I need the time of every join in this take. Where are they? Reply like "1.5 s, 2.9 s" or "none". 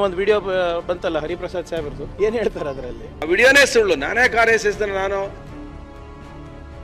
2.0 s, 3.2 s, 5.5 s